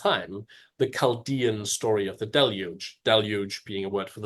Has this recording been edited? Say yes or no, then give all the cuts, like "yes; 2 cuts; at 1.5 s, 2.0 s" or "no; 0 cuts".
no; 0 cuts